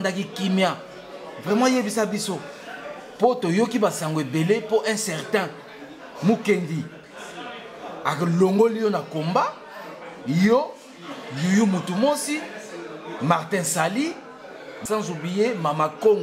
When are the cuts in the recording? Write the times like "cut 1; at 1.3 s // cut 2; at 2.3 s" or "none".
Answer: cut 1; at 14.7 s